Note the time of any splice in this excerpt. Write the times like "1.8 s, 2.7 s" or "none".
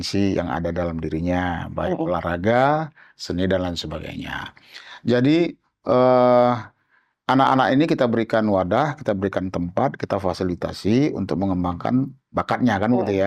none